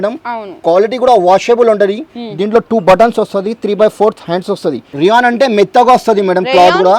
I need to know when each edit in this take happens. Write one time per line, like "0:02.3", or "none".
0:04.9